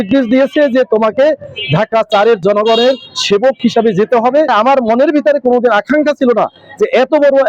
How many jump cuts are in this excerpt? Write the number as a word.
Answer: one